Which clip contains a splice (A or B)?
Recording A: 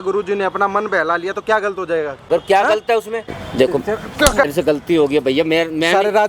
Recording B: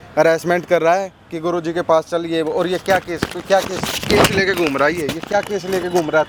A